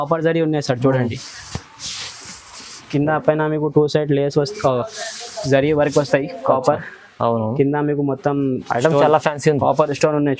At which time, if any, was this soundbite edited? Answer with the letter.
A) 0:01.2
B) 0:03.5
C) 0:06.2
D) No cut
D